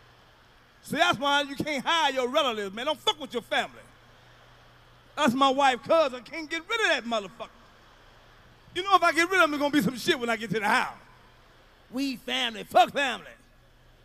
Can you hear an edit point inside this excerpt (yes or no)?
yes